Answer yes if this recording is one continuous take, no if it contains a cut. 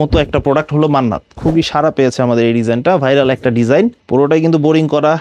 no